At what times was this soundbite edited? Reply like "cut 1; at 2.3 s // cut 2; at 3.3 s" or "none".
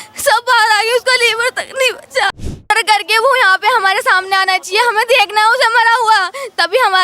cut 1; at 2.7 s